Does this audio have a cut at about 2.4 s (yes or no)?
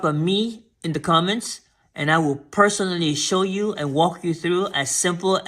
no